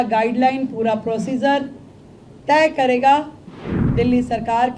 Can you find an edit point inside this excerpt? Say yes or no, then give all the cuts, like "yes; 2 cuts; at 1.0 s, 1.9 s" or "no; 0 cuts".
yes; 1 cut; at 3.5 s